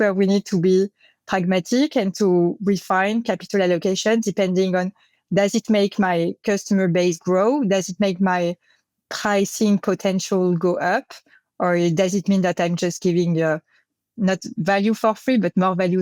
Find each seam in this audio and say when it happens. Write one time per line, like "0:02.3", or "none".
none